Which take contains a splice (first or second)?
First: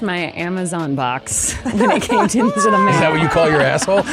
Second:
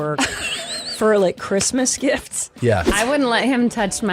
second